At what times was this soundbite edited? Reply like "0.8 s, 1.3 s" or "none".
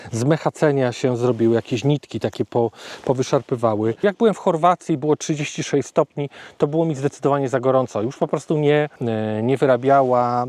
4.0 s, 9.0 s